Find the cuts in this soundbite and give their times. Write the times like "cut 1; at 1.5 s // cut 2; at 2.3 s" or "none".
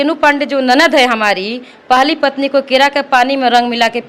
none